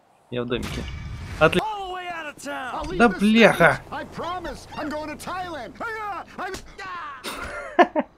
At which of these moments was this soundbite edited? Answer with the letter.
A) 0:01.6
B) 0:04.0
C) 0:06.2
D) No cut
A